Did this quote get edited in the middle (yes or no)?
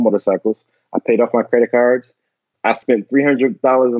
yes